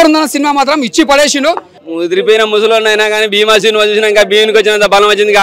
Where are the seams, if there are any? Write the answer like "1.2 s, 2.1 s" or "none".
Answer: 1.7 s

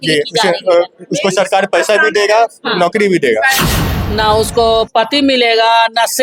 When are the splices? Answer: 3.6 s

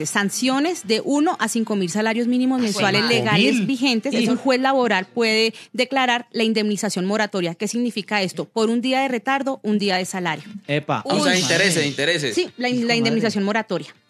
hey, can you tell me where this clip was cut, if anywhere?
4.3 s

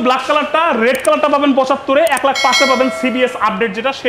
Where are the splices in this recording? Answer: none

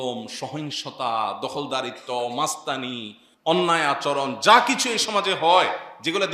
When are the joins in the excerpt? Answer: none

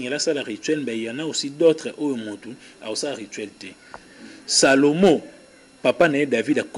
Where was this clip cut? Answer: 4.1 s

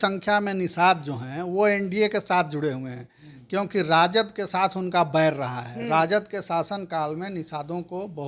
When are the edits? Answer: none

